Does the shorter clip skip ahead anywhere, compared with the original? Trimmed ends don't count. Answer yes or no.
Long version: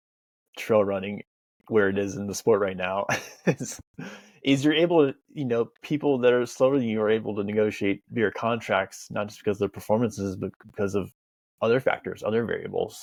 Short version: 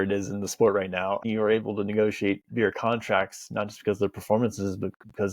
yes